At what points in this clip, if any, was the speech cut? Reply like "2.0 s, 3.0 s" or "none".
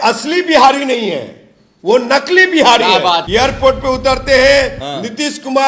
3.2 s